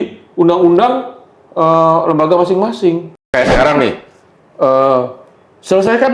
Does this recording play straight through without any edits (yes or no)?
no